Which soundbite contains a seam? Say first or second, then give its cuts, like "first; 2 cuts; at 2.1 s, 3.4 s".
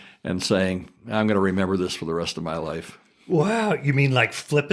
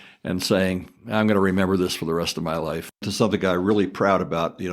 second; 1 cut; at 3.1 s